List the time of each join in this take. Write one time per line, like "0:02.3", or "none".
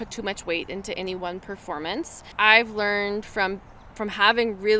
0:02.2

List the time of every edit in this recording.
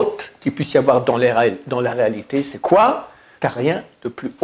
0:03.2

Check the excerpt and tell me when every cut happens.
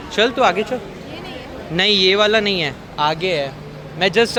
none

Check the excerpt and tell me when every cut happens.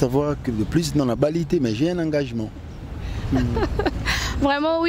none

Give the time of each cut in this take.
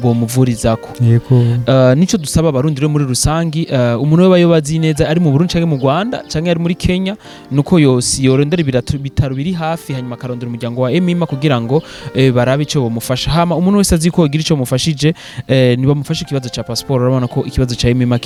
none

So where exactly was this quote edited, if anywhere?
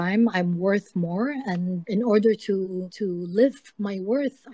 0:01.8
0:02.9

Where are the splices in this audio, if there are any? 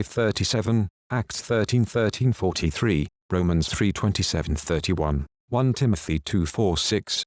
0:02.8

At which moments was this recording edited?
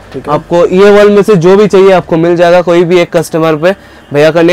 none

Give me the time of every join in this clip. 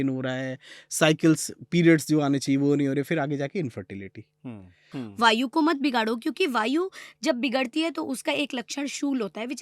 0:05.0

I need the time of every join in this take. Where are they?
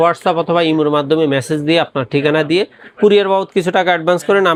none

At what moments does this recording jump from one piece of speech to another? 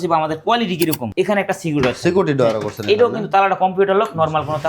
0:01.0

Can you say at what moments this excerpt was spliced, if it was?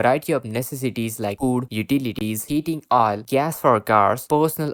none

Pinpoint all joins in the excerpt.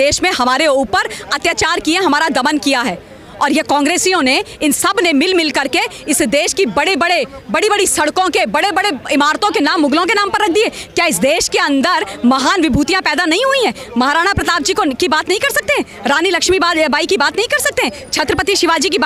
none

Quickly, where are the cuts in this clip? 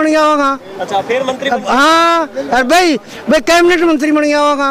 none

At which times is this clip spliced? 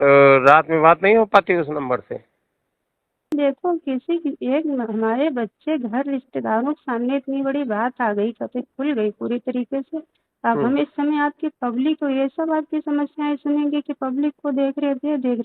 0:03.3

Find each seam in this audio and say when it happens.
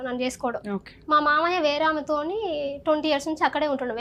none

